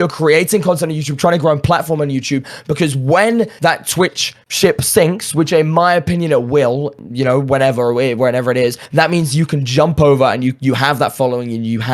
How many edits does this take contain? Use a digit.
0